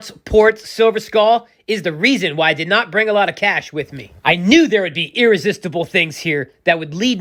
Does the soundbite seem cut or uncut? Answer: uncut